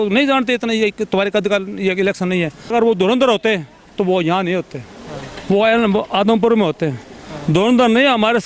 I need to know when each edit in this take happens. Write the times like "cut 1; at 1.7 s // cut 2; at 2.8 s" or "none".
cut 1; at 2.7 s